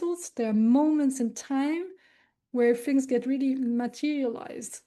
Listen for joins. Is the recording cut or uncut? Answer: uncut